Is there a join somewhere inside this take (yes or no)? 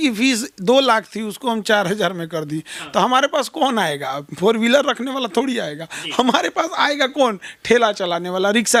no